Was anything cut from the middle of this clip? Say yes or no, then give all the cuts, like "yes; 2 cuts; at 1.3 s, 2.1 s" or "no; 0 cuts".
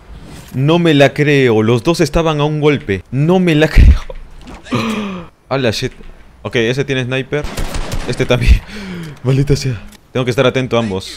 no; 0 cuts